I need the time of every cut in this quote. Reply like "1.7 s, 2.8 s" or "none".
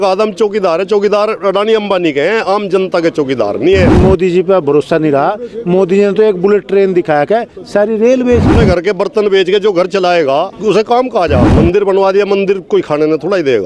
3.9 s, 8.5 s, 10.5 s, 11.5 s